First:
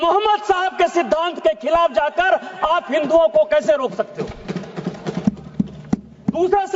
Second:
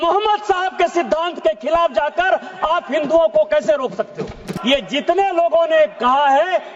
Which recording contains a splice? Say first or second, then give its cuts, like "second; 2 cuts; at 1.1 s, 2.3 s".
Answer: second; 1 cut; at 4.5 s